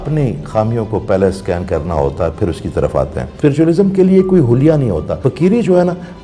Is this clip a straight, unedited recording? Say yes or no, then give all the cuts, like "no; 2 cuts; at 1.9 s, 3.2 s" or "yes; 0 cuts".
no; 2 cuts; at 3.2 s, 5.2 s